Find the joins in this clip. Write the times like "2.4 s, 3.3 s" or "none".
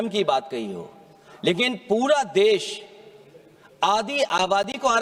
none

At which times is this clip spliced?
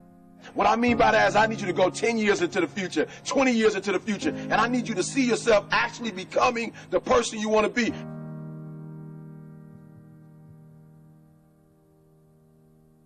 none

